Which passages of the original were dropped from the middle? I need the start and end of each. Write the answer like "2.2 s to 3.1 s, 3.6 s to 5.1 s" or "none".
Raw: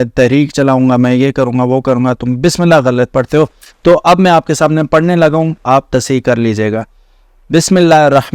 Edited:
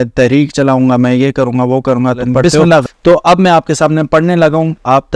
2.8 s to 3.6 s